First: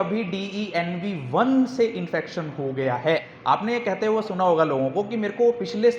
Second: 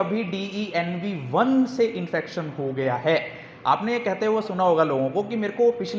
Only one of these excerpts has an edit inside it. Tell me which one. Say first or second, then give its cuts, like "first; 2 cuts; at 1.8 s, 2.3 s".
first; 1 cut; at 3.3 s